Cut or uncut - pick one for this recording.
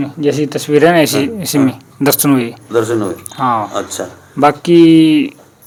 uncut